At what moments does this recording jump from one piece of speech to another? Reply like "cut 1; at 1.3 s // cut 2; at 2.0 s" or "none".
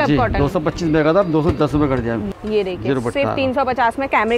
cut 1; at 2.2 s